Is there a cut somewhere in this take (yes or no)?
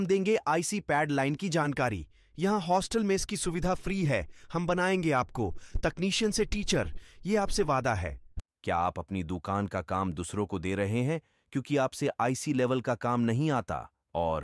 yes